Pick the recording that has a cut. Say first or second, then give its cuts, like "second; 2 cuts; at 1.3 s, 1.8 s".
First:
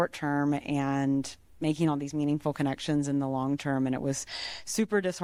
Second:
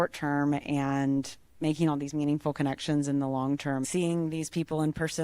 second; 1 cut; at 3.8 s